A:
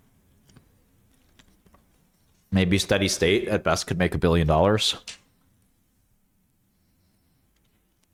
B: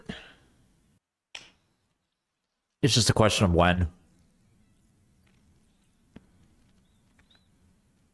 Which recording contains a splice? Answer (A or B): B